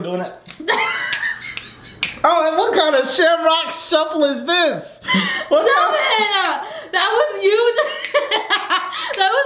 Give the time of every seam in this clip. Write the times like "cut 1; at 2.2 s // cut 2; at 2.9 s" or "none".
none

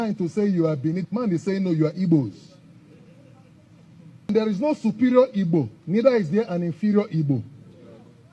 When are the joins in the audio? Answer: cut 1; at 4.3 s

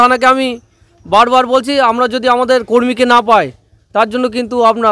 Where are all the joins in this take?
none

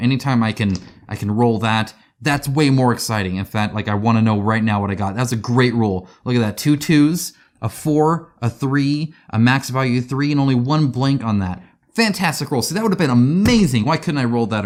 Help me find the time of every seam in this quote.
none

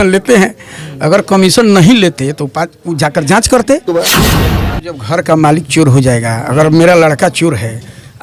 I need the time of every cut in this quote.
cut 1; at 4.4 s

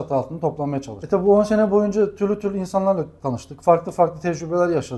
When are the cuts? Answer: cut 1; at 0.9 s

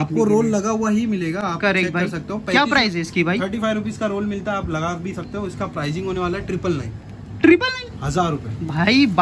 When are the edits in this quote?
none

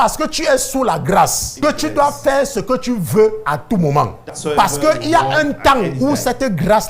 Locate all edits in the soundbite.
cut 1; at 1.5 s // cut 2; at 4.2 s

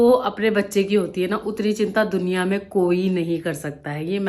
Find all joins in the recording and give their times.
none

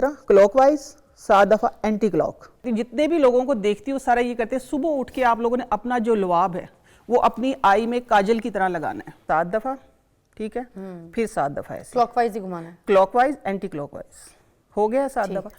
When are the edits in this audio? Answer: cut 1; at 2.7 s // cut 2; at 9.1 s

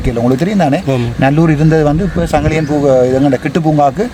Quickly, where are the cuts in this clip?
none

